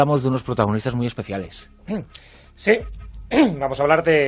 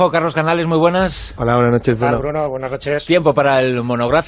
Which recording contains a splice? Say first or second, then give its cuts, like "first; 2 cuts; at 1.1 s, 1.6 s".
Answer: second; 1 cut; at 2.2 s